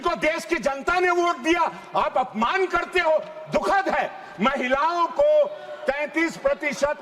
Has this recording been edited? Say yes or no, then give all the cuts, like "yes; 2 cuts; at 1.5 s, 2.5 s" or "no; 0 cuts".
no; 0 cuts